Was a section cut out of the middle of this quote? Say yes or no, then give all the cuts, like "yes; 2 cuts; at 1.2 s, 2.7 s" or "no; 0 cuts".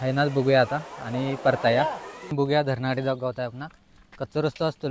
yes; 1 cut; at 2.3 s